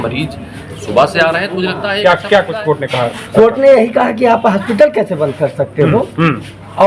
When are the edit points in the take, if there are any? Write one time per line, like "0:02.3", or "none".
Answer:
0:02.0

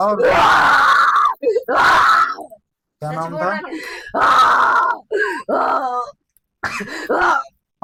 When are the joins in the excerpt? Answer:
none

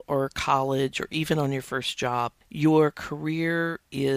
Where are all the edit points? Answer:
0:02.4

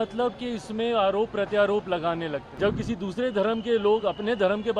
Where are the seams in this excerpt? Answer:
0:02.5

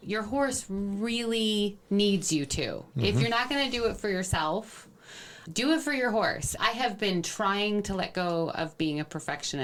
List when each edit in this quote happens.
none

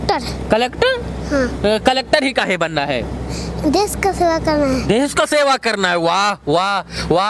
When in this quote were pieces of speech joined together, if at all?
none

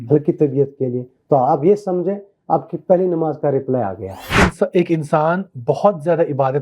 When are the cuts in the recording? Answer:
0:04.4

